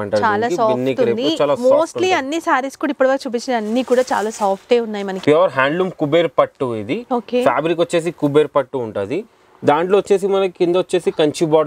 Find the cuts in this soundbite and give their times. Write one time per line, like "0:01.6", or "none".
0:05.1